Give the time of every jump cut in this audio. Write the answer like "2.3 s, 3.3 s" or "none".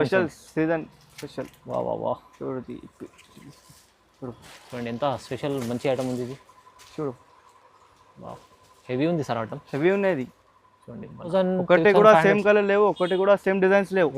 11.3 s